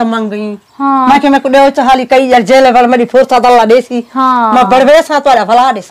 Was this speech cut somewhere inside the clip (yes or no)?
no